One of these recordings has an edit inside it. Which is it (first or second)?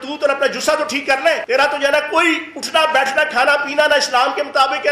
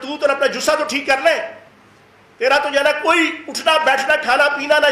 first